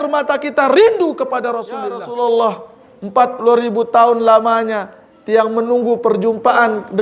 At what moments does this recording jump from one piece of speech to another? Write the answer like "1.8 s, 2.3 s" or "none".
2.0 s

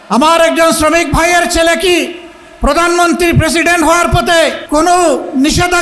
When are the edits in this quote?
4.6 s

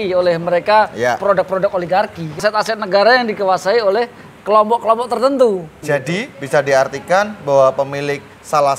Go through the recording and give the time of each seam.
2.4 s, 5.7 s

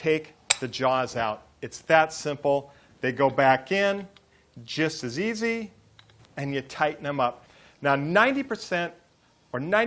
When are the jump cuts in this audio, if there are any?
none

